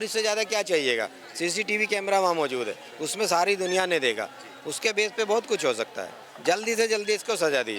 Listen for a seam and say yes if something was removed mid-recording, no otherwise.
no